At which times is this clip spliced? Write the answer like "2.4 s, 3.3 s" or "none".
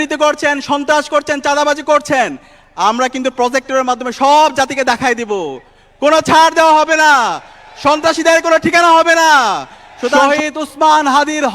10.2 s